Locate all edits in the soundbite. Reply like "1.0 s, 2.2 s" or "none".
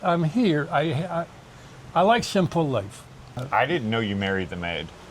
3.4 s